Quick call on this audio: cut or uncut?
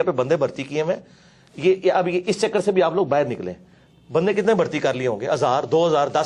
uncut